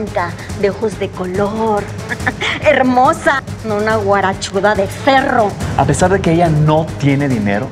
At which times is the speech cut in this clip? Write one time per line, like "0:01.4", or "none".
0:05.6